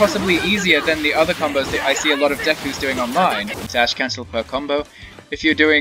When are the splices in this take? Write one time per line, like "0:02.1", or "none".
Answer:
0:03.7